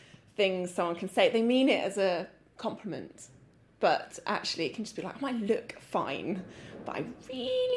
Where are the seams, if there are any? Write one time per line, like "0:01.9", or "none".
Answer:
none